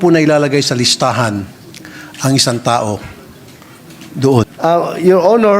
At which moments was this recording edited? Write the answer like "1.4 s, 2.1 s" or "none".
4.4 s

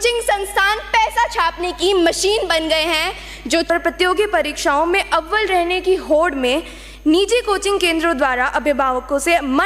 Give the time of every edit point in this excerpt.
3.7 s

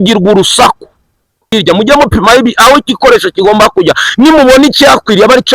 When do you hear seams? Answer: 1.5 s

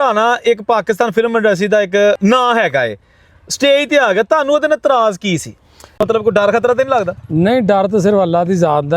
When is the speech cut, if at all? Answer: 2.2 s, 6.0 s

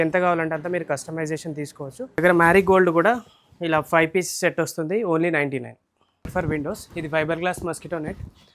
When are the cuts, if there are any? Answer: 2.2 s, 6.3 s

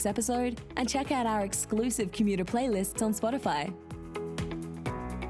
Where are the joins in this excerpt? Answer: 3.9 s

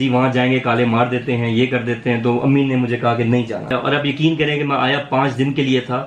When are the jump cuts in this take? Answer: 3.7 s

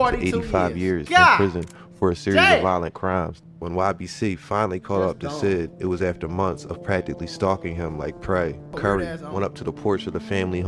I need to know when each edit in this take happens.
3.4 s, 8.7 s

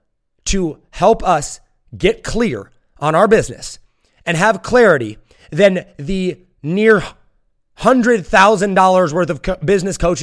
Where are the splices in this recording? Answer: none

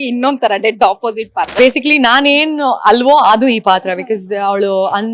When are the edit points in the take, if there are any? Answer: 1.6 s

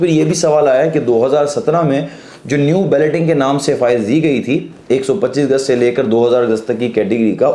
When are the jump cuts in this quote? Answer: none

